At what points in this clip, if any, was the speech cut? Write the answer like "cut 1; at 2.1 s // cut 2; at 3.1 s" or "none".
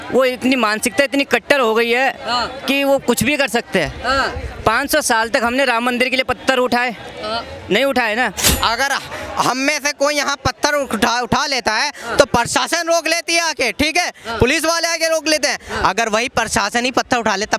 cut 1; at 8.4 s